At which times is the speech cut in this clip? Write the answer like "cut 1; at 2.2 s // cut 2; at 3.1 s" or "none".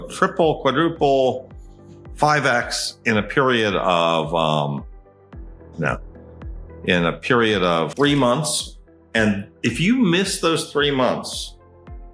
cut 1; at 7.9 s